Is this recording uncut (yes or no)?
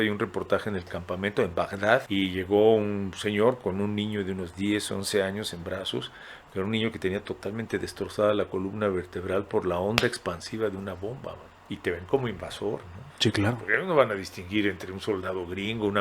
no